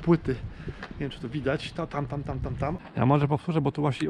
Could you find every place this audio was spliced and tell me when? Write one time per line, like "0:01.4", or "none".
0:02.8